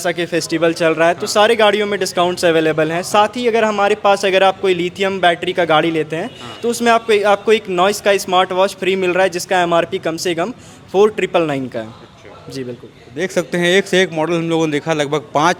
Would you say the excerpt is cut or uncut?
uncut